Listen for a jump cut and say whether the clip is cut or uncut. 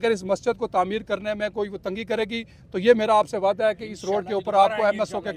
uncut